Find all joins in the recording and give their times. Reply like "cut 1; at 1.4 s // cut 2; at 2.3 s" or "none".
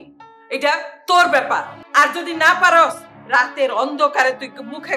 cut 1; at 1.8 s